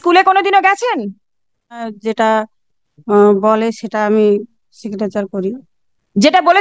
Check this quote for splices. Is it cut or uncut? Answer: cut